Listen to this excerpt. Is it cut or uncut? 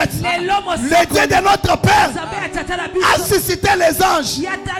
uncut